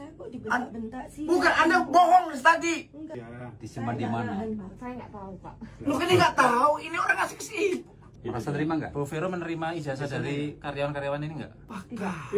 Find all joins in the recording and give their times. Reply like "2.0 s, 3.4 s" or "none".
3.1 s